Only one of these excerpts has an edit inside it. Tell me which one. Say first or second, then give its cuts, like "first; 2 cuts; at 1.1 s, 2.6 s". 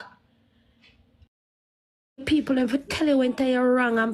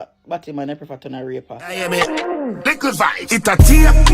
second; 1 cut; at 1.7 s